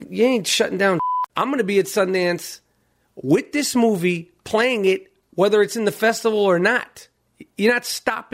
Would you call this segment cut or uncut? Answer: cut